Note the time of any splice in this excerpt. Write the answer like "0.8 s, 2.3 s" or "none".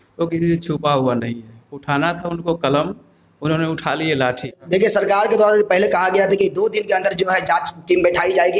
4.5 s